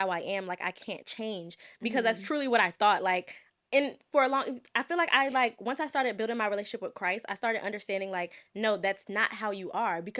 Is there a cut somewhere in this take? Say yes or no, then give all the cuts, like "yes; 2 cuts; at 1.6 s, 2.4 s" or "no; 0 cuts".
no; 0 cuts